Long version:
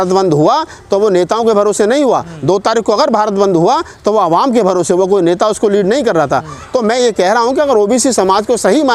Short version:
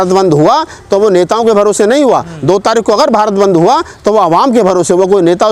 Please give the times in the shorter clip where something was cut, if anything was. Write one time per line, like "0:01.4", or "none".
none